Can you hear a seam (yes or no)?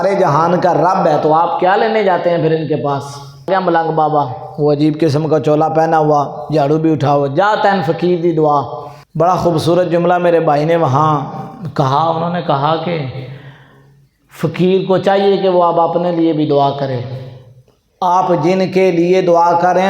yes